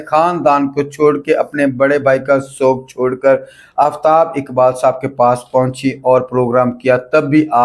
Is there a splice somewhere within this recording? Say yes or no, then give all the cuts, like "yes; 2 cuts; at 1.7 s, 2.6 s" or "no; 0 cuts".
no; 0 cuts